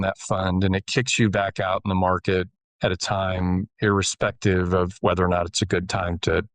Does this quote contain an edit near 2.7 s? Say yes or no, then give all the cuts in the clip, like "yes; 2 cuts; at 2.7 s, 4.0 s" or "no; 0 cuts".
no; 0 cuts